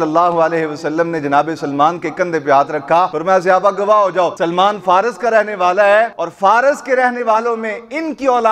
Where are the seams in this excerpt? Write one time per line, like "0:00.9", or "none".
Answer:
0:03.2
0:04.4
0:06.2